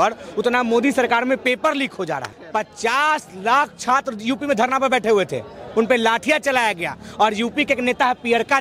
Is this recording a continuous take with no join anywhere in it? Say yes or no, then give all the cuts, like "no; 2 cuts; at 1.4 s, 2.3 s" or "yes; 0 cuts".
no; 1 cut; at 2.3 s